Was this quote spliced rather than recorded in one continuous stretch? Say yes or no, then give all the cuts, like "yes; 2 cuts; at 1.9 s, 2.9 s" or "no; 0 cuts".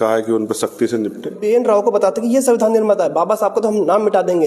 yes; 1 cut; at 1.4 s